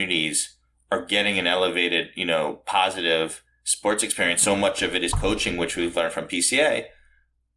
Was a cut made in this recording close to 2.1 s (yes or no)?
no